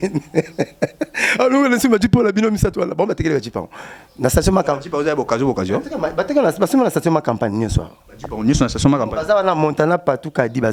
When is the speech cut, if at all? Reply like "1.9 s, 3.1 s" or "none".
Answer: none